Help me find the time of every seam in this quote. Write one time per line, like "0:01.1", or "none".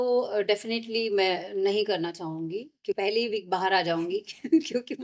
0:03.0